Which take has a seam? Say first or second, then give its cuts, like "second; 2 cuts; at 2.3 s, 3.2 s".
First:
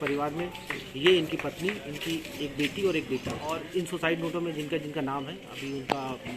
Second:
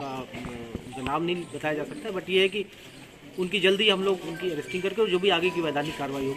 first; 1 cut; at 3.4 s